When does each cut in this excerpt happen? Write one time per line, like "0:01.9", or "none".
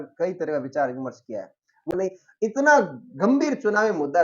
0:01.9